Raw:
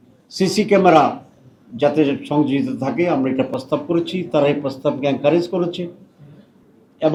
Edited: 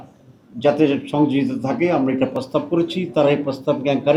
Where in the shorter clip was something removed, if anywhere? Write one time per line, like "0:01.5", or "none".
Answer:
none